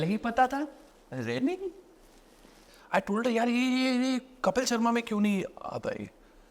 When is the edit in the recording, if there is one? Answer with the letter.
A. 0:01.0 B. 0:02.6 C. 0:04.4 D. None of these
B